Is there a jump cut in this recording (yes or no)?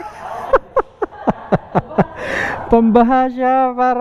no